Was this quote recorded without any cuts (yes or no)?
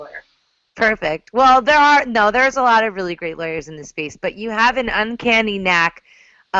yes